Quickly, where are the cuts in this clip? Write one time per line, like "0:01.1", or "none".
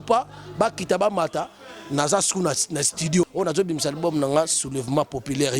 0:03.3